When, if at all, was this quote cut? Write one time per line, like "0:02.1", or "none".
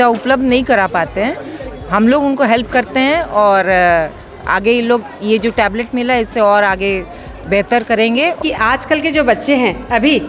0:08.4

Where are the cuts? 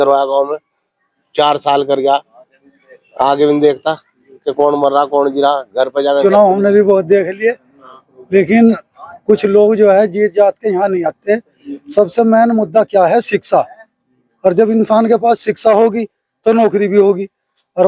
0:06.2

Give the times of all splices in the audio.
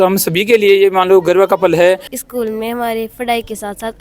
0:02.1

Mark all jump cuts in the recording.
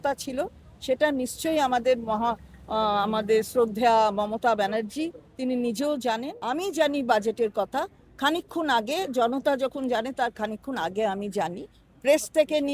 0:06.3

